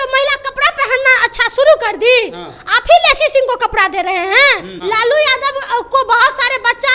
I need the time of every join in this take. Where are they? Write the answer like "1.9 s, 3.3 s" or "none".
4.7 s